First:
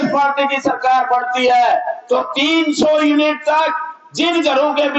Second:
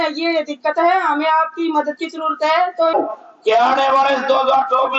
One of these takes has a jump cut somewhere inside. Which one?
second; 1 cut; at 2.9 s

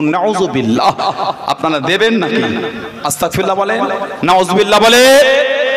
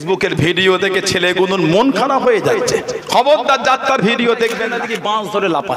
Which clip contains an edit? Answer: second; 1 cut; at 4.8 s

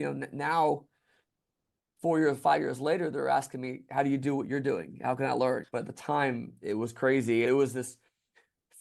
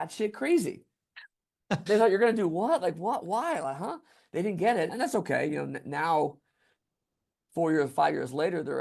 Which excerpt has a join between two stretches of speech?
first; 2 cuts; at 5.6 s, 7.5 s

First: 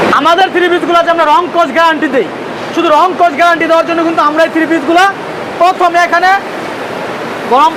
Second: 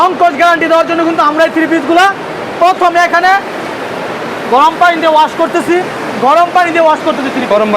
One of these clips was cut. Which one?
second; 1 cut; at 6.0 s

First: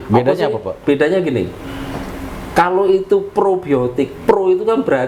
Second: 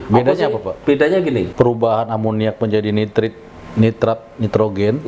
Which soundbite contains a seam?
second; 1 cut; at 1.5 s

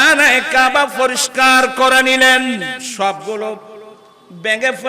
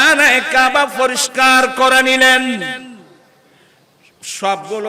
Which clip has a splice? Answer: first; 1 cut; at 2.8 s

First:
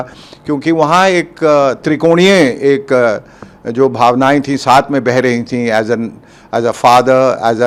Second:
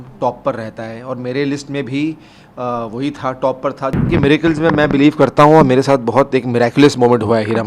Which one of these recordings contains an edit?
second; 1 cut; at 4.1 s

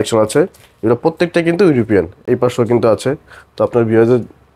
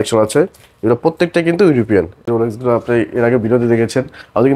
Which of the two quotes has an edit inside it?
second; 1 cut; at 2.3 s

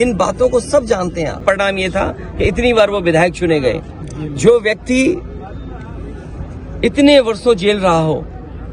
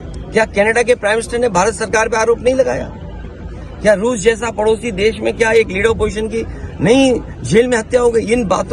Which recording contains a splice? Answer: first; 1 cut; at 1.4 s

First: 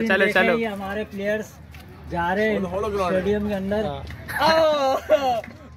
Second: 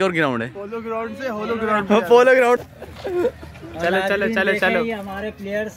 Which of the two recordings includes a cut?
second; 1 cut; at 3.2 s

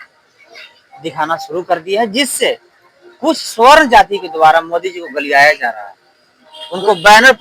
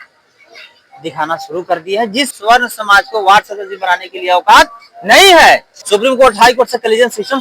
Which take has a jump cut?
second; 2 cuts; at 2.3 s, 5.7 s

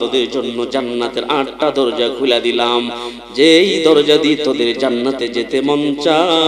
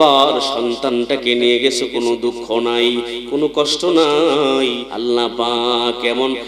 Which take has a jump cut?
second; 1 cut; at 4.9 s

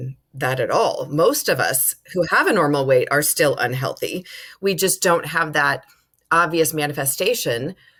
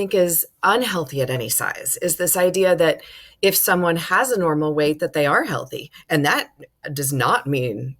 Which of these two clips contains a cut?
second; 1 cut; at 6.9 s

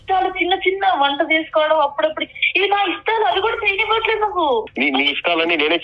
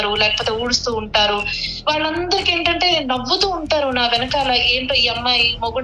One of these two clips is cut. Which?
first; 1 cut; at 4.7 s

